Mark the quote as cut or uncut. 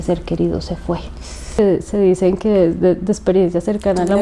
cut